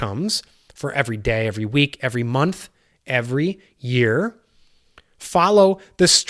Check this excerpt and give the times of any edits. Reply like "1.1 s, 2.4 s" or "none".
none